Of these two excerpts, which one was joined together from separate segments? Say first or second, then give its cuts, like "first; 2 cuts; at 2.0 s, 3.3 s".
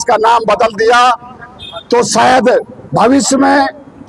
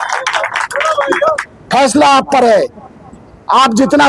second; 1 cut; at 1.5 s